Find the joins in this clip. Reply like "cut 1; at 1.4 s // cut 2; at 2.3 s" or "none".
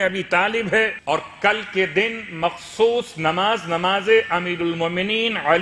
cut 1; at 1.0 s